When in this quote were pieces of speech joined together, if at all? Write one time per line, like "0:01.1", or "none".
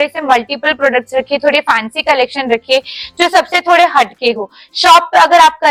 none